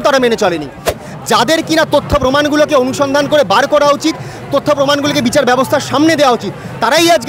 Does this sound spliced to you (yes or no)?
yes